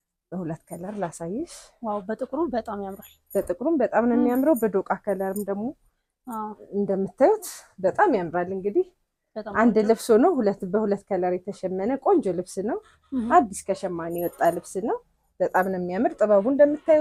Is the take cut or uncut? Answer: uncut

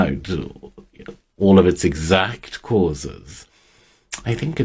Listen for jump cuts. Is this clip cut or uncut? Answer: uncut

